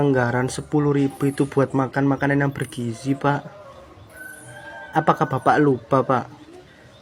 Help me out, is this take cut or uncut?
uncut